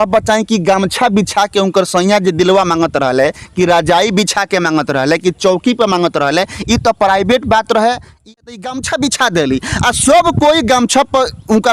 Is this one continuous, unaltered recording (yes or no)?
no